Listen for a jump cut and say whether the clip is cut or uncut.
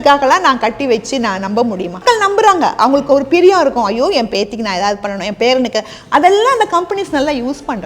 cut